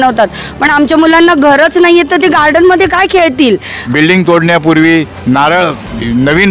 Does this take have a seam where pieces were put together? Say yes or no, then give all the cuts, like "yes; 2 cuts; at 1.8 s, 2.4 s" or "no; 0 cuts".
yes; 1 cut; at 3.8 s